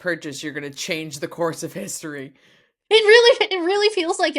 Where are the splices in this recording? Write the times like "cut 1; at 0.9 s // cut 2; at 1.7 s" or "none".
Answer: none